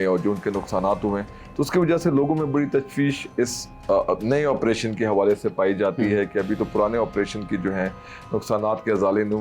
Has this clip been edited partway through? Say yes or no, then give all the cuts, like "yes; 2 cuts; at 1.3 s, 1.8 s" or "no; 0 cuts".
no; 0 cuts